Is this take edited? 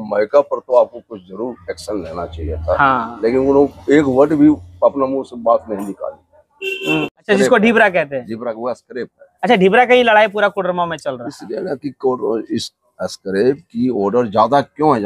yes; 1 cut; at 7.1 s

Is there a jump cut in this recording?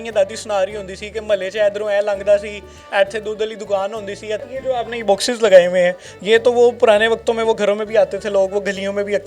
yes; 1 cut; at 4.5 s

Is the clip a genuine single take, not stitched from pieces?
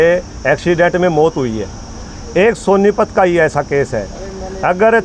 yes; 0 cuts

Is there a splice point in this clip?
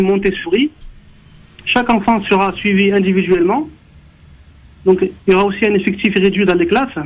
no; 0 cuts

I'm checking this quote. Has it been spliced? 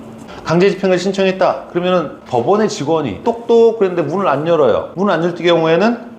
yes; 2 cuts; at 3.2 s, 4.9 s

